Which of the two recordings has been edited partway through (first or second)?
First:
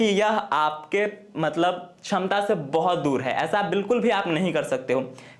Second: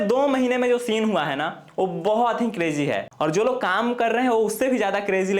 second